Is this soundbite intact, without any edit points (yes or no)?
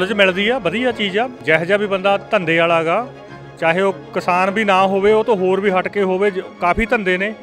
no